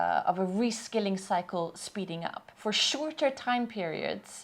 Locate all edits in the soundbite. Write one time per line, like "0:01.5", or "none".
0:02.4